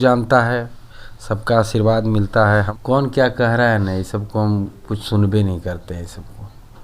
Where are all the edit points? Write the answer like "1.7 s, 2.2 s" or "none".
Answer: 2.7 s